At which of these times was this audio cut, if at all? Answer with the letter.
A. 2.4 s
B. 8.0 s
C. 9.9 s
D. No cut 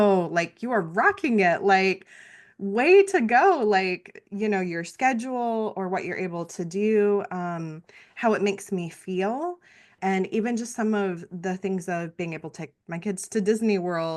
C